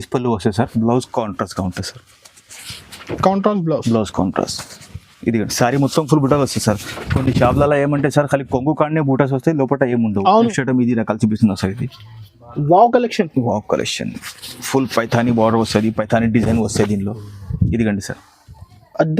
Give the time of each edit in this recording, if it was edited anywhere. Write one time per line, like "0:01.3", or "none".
0:10.5